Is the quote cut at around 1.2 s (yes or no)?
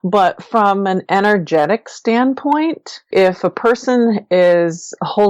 no